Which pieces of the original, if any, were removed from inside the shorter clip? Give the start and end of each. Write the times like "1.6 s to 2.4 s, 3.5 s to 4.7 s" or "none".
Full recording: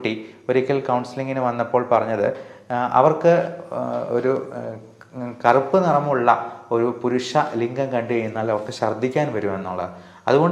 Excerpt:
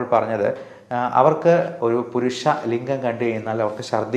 3.5 s to 6.6 s